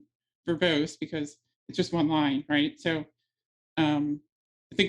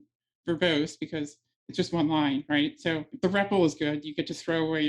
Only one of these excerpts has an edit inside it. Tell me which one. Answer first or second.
second